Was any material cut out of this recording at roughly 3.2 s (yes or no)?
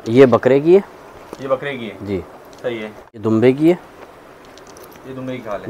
yes